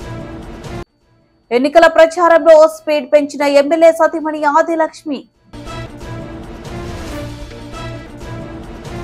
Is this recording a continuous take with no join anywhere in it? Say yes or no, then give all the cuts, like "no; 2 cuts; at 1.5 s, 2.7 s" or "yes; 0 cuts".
yes; 0 cuts